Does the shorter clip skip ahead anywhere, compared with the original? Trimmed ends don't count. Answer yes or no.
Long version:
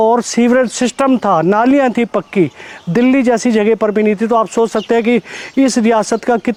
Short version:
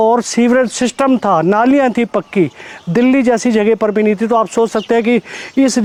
no